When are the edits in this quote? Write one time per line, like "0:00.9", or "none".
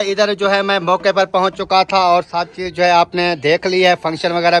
none